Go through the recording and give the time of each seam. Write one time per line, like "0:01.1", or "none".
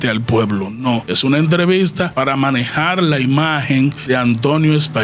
0:01.1
0:02.1
0:04.0